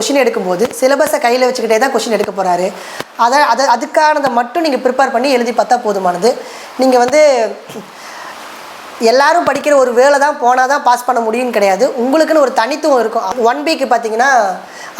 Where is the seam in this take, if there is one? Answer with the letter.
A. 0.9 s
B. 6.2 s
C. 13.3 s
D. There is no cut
C